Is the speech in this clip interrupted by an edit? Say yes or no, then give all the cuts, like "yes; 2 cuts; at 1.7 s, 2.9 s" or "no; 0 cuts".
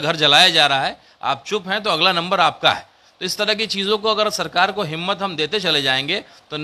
no; 0 cuts